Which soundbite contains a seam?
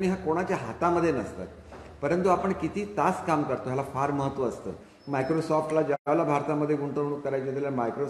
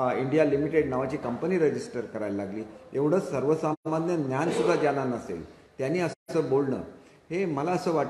first; 1 cut; at 4.9 s

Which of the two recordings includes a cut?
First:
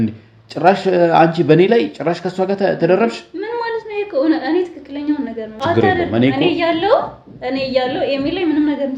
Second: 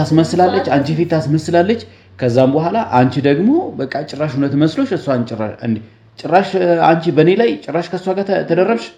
first; 1 cut; at 5.5 s

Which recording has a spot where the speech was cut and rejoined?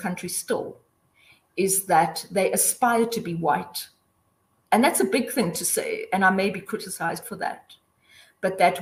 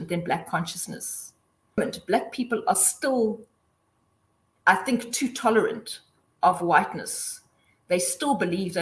second; 1 cut; at 1.8 s

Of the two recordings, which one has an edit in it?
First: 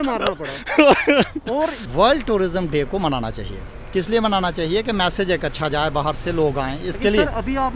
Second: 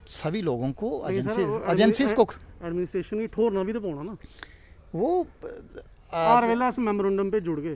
first; 1 cut; at 1.8 s

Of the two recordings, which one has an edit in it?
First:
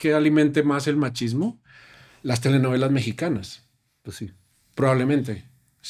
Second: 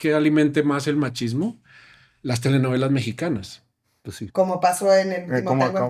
second; 1 cut; at 4.2 s

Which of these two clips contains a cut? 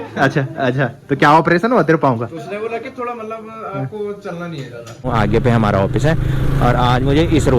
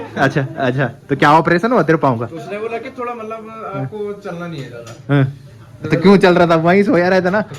first; 1 cut; at 5.1 s

